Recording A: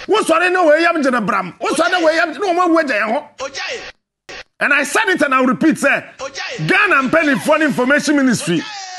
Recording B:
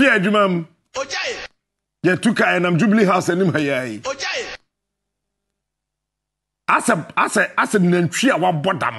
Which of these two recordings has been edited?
A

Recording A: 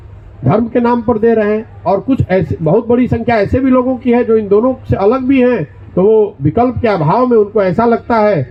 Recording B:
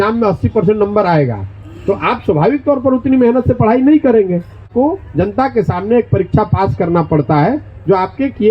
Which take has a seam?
B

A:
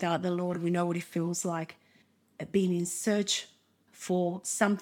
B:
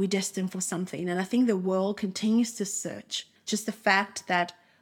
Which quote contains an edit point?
B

